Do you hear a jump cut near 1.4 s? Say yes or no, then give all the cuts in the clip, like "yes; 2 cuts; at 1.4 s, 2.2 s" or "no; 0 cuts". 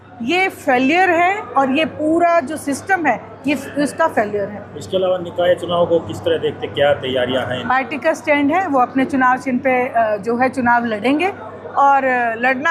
no; 0 cuts